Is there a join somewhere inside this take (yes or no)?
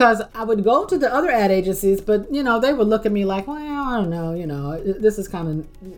no